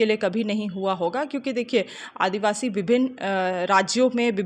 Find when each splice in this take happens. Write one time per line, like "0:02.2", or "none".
none